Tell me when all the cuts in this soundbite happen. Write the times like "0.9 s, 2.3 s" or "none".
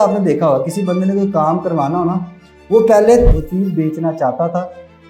3.3 s